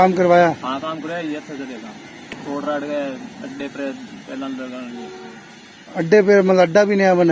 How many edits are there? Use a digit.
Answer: 1